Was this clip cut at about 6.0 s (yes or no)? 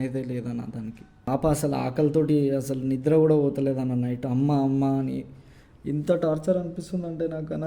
no